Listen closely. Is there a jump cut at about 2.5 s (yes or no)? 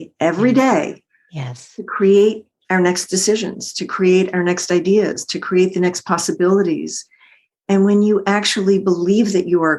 yes